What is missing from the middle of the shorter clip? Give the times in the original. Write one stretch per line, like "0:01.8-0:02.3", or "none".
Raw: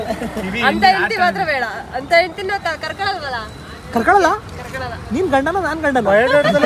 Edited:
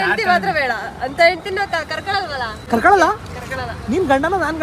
0:03.4-0:03.7